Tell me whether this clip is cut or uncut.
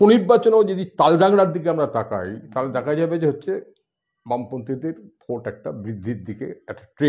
uncut